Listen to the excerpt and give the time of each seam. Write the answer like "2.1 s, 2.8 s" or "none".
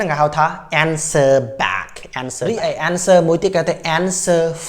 2.4 s